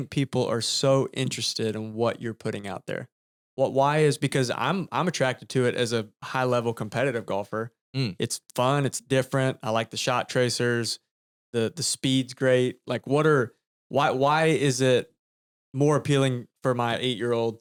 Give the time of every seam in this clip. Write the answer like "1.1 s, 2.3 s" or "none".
none